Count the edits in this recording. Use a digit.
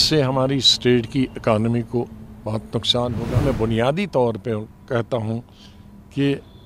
1